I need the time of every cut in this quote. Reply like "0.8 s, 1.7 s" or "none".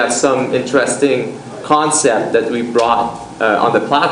0.9 s